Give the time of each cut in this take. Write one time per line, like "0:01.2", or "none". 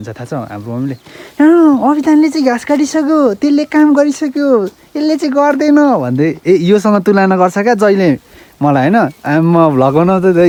none